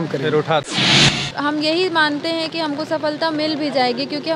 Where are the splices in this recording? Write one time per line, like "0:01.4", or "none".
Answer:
0:01.0